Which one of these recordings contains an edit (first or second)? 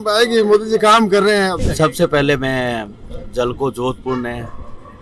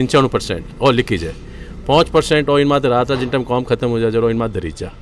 first